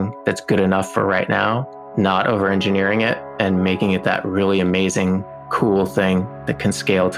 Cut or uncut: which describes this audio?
uncut